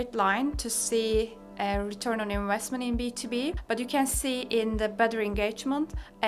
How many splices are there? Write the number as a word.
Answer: one